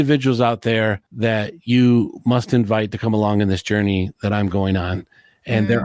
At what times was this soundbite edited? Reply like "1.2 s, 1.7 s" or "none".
1.1 s